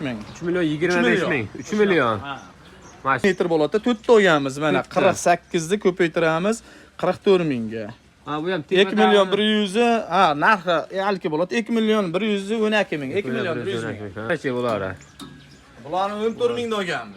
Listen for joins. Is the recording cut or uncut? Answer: cut